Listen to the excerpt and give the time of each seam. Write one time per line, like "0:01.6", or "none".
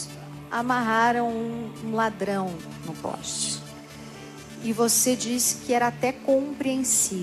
0:02.6